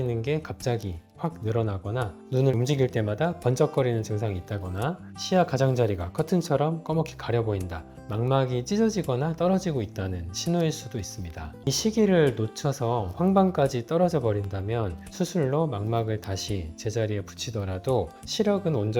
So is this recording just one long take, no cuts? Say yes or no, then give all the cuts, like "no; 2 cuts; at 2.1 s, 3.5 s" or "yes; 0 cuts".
no; 1 cut; at 11.6 s